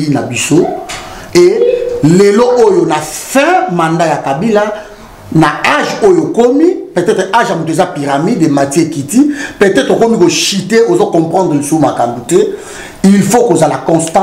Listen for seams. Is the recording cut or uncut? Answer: uncut